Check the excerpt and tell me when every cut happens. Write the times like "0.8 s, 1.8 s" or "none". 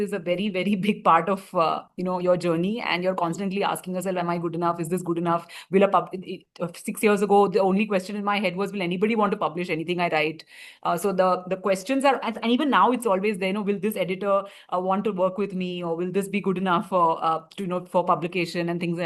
none